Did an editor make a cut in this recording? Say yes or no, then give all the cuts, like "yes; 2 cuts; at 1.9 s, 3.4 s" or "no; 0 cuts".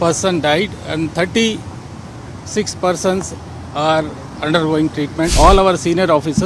yes; 1 cut; at 5.3 s